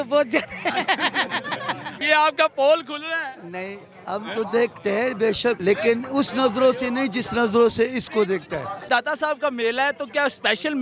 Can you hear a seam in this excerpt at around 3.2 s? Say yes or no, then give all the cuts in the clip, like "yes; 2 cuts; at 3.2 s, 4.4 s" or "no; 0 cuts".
no; 3 cuts; at 1.9 s, 5.6 s, 8.8 s